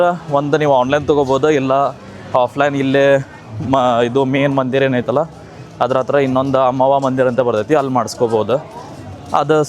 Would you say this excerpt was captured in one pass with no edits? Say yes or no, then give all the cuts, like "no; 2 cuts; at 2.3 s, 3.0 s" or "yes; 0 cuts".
yes; 0 cuts